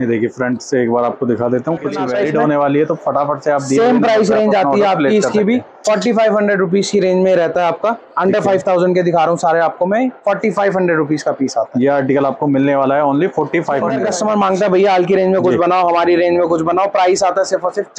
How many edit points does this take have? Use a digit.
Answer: 2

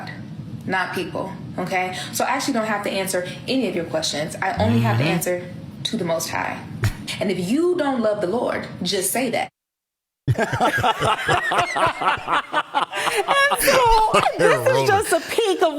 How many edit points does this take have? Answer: 0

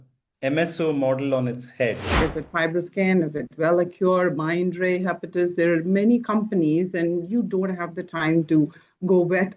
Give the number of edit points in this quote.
1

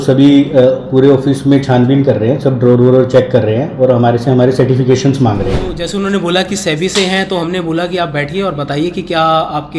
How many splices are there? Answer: 1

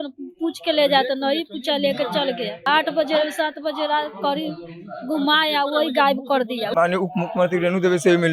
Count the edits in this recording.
2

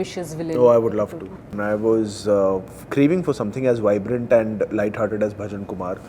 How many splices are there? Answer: 1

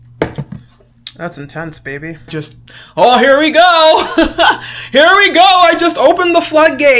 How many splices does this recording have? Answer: 1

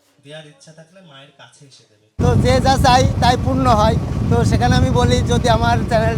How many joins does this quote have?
1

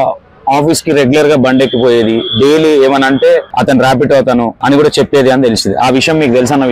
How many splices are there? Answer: 2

